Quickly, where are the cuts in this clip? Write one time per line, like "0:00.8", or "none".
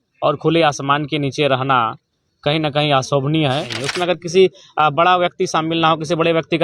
0:03.7